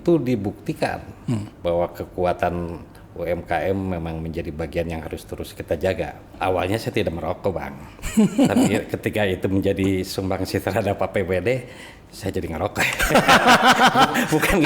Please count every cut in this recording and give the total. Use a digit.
1